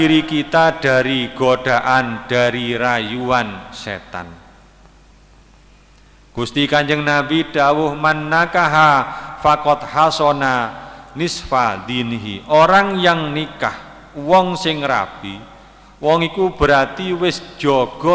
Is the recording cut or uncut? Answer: uncut